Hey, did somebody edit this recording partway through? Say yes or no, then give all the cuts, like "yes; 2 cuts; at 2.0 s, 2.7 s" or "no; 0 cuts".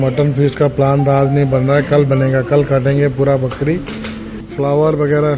yes; 1 cut; at 4.5 s